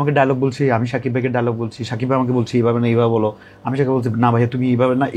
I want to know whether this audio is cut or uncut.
uncut